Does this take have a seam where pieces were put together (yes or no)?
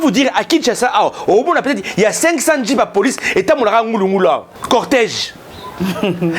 yes